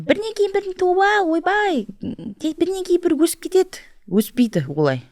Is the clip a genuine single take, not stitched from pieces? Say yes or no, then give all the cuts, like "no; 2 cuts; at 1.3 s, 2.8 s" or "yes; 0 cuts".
yes; 0 cuts